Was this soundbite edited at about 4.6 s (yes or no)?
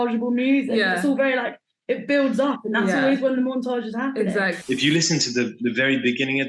yes